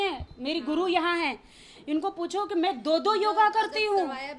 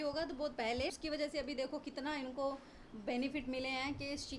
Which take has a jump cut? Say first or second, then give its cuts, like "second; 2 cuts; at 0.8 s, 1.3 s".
second; 1 cut; at 0.9 s